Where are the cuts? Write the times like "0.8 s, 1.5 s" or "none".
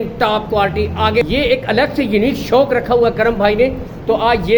1.2 s